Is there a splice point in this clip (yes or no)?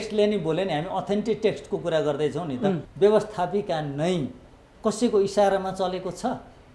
yes